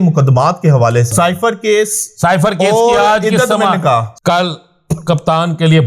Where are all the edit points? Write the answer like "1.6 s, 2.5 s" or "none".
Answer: 1.1 s, 4.1 s